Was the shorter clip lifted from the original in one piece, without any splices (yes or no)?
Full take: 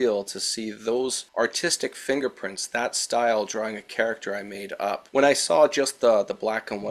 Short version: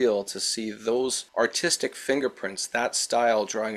yes